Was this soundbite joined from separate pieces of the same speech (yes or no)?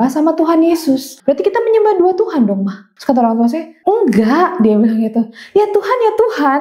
yes